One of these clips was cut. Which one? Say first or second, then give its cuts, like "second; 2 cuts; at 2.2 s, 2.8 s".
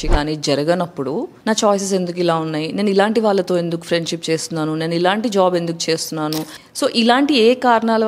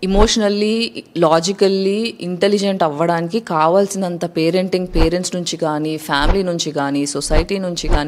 first; 2 cuts; at 1.3 s, 6.6 s